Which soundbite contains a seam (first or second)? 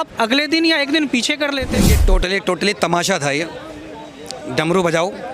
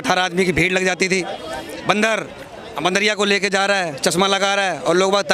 first